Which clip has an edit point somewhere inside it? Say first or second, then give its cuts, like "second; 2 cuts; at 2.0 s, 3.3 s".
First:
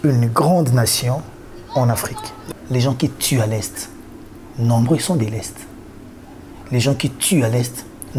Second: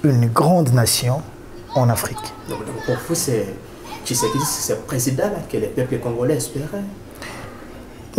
first; 1 cut; at 2.4 s